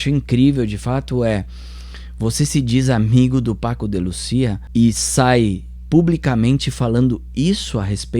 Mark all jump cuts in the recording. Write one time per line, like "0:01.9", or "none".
0:04.6